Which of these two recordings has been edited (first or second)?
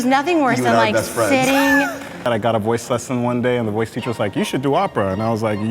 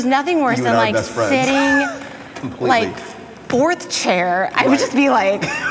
first